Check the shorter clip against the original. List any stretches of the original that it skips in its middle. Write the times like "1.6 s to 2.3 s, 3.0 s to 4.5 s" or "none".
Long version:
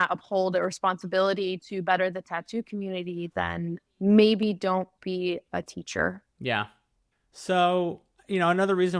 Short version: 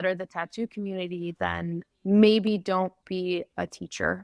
none

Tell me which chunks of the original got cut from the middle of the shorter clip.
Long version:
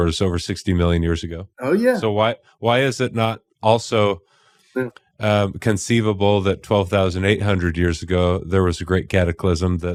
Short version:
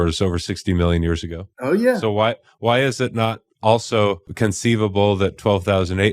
4.3 s to 5.6 s

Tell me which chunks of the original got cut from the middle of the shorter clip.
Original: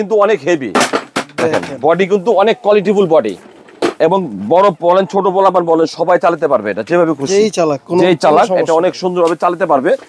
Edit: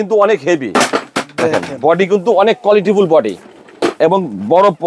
none

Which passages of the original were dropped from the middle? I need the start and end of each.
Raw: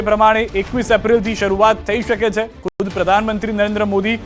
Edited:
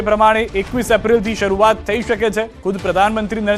2.6 s to 2.7 s

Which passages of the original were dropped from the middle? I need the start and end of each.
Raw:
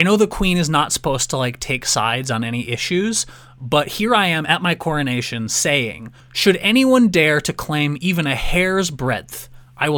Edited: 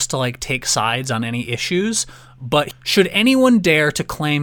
3.9 s to 6.2 s

